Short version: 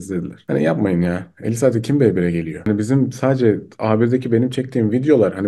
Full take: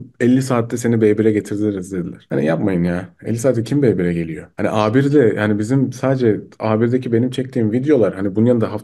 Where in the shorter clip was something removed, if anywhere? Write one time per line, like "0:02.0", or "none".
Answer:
0:02.6